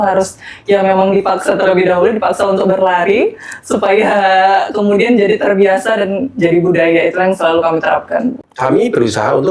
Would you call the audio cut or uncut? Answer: cut